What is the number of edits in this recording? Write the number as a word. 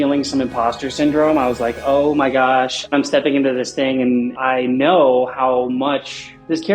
two